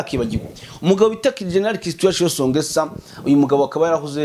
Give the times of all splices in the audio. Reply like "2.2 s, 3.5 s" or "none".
none